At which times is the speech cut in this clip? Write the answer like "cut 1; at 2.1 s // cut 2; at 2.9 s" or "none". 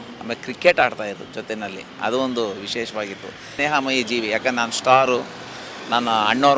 cut 1; at 3.5 s